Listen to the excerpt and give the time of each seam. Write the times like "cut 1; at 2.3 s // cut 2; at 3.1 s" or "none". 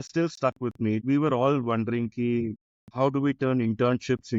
cut 1; at 1.0 s // cut 2; at 2.6 s